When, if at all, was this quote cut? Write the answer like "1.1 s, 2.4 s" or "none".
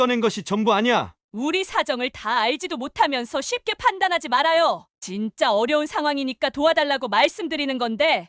1.2 s